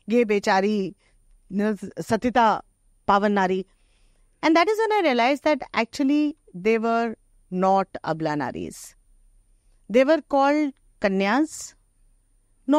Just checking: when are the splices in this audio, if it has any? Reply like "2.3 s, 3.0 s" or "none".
none